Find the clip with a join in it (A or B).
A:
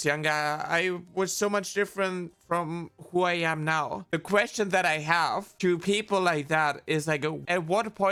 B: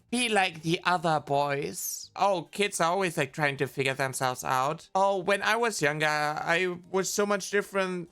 B